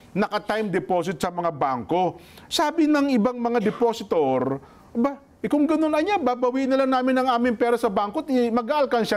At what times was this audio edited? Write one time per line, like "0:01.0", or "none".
none